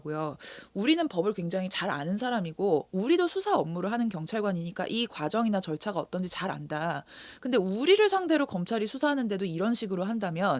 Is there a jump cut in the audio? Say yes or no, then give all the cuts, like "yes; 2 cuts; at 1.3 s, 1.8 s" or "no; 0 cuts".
no; 0 cuts